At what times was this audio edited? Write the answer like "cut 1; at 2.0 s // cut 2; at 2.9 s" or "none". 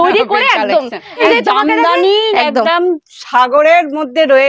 cut 1; at 1.2 s